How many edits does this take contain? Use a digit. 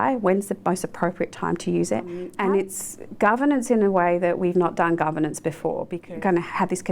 2